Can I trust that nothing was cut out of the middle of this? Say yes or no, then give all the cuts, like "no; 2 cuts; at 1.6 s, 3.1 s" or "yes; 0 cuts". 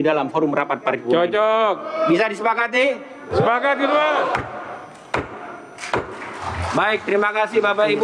yes; 0 cuts